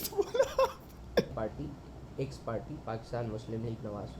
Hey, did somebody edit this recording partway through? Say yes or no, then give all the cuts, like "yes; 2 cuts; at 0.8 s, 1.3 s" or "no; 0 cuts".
yes; 1 cut; at 1.3 s